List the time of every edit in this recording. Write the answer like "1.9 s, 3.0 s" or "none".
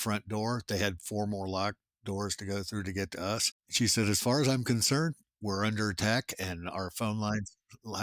3.6 s